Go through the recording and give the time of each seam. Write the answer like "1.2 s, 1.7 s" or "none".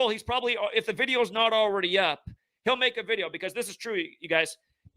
none